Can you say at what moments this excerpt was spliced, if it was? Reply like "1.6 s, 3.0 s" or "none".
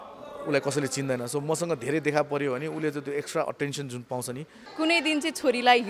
4.6 s